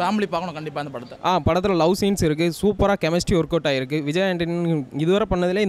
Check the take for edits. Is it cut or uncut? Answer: cut